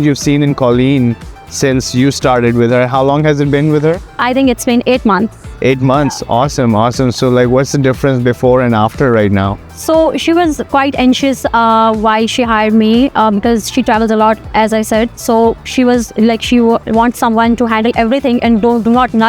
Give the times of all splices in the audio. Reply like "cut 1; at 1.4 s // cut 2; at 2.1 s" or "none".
none